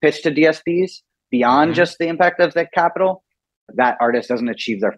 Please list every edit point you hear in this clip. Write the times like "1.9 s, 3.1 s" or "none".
3.7 s